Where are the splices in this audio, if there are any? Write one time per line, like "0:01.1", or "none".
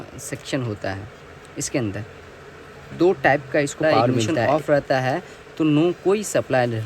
0:04.3